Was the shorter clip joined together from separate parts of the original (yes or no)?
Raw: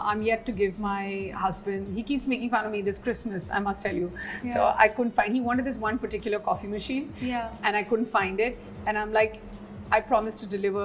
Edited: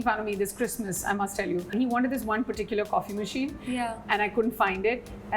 yes